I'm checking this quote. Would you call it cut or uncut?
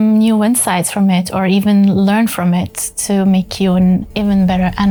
uncut